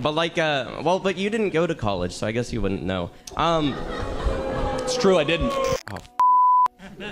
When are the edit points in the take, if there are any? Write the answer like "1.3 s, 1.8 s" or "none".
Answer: 5.8 s